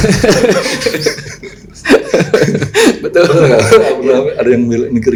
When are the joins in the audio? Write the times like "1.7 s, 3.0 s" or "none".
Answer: none

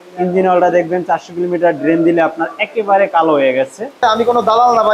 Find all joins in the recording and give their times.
4.0 s

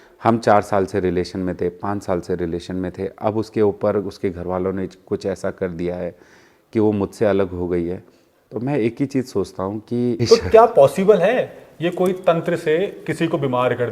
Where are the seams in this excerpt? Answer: 10.2 s

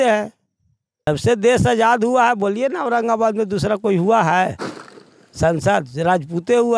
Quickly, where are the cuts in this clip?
1.1 s

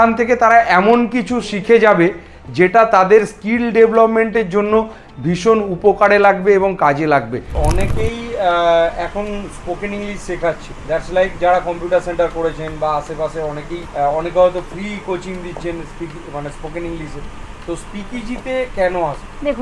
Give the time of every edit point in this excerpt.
none

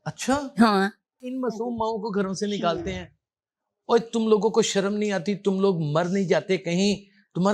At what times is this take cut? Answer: 1.2 s

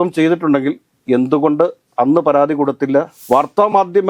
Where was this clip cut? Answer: 3.2 s

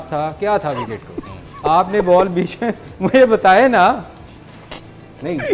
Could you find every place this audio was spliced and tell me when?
none

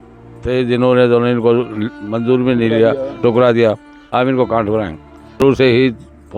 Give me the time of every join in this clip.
5.3 s

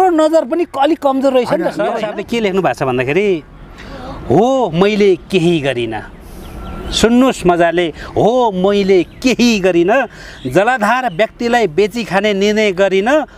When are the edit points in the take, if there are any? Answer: 2.1 s

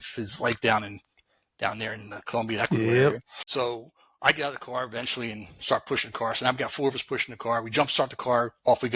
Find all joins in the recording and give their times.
none

